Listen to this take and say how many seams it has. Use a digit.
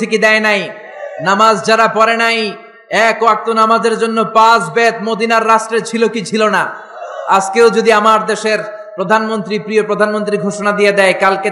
0